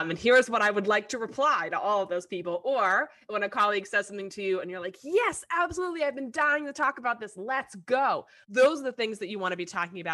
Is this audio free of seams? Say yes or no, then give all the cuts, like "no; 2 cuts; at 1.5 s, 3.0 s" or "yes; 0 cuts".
no; 1 cut; at 8.4 s